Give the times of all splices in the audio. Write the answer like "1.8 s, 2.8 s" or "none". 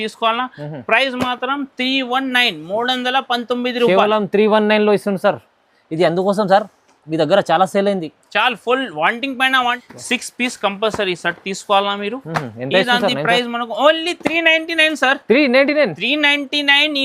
9.8 s

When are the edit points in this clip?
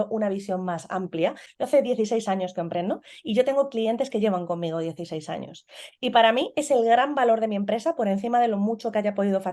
1.5 s

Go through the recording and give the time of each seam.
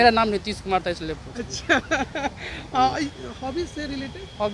none

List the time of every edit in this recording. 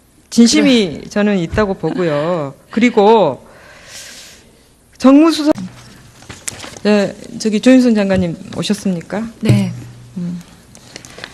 5.4 s

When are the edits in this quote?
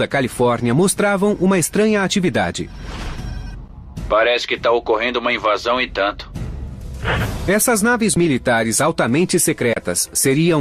none

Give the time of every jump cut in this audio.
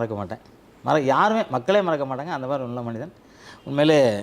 none

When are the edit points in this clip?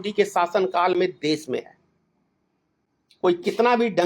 none

